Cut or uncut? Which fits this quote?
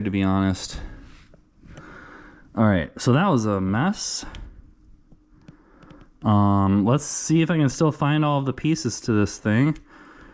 uncut